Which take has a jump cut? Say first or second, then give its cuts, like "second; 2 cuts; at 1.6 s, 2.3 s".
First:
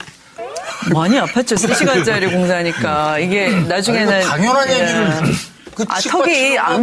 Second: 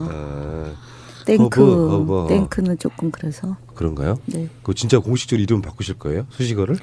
second; 1 cut; at 5.8 s